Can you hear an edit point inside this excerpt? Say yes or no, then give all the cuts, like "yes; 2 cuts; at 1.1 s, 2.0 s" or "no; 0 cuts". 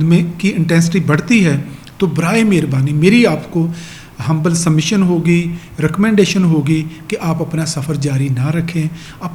no; 0 cuts